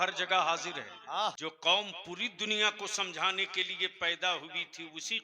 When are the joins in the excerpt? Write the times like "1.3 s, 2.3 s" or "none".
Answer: 1.4 s